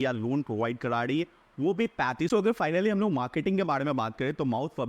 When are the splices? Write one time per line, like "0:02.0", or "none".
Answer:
0:02.3